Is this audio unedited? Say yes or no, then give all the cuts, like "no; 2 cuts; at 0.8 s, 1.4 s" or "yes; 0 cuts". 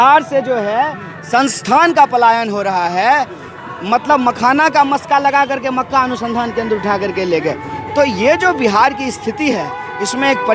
yes; 0 cuts